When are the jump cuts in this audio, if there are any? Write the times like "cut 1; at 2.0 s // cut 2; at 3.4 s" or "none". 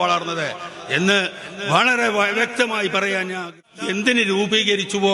cut 1; at 3.5 s